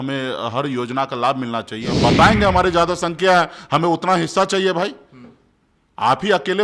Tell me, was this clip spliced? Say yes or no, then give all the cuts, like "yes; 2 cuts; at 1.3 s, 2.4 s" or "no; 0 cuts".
yes; 1 cut; at 2.0 s